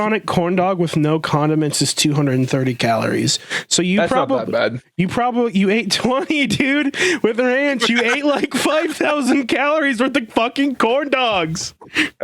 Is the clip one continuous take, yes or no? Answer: yes